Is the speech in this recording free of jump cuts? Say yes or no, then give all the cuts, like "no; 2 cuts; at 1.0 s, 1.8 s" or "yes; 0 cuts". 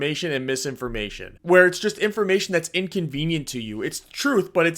no; 1 cut; at 1.3 s